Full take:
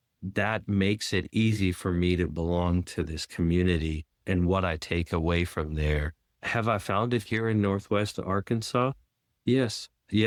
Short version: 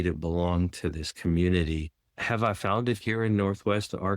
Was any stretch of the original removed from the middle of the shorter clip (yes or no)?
yes